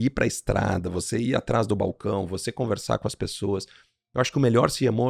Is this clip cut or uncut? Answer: uncut